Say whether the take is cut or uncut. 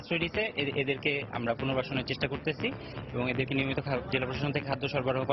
uncut